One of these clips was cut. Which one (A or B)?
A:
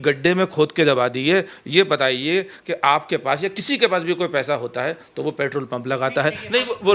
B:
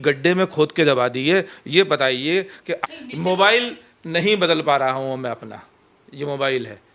B